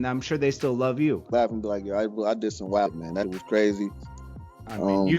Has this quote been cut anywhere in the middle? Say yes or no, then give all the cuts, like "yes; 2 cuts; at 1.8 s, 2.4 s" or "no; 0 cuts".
yes; 1 cut; at 3.1 s